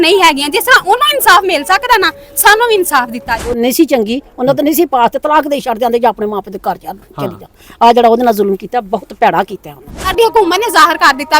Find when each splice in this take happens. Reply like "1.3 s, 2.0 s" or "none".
3.5 s, 10.1 s